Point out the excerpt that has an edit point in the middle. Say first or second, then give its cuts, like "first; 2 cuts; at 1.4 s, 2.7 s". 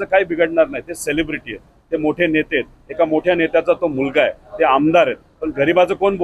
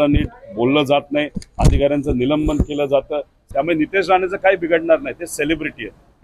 second; 1 cut; at 3.4 s